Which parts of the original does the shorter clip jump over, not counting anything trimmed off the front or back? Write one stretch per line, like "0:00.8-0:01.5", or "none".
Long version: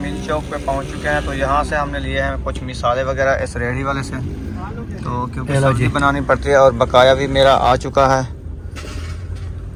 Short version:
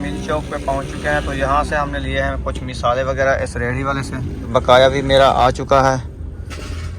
0:04.5-0:06.8